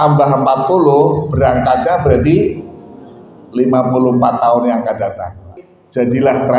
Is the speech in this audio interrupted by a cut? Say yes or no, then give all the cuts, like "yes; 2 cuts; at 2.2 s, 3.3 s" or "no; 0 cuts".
yes; 1 cut; at 5.5 s